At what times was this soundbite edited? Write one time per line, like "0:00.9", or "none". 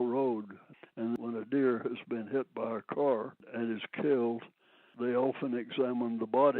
0:01.1